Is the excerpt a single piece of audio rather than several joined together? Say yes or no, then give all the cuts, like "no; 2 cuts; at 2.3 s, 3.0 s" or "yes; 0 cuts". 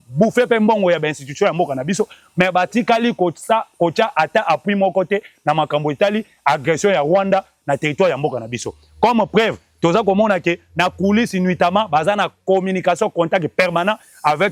yes; 0 cuts